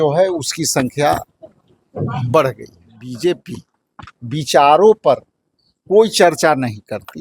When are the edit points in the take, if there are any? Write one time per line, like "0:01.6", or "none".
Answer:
0:03.0